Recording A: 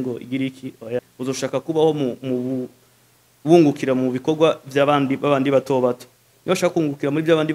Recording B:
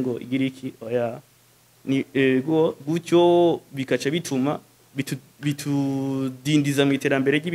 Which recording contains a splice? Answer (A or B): A